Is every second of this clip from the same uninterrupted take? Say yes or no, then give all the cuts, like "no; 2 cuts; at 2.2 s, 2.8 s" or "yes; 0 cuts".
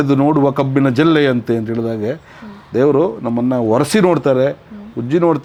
yes; 0 cuts